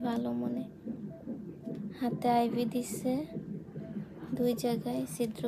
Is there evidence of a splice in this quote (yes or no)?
no